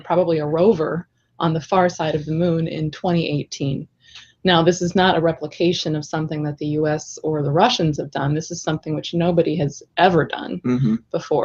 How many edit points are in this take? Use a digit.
1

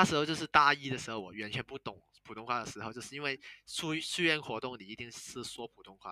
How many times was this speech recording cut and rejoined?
0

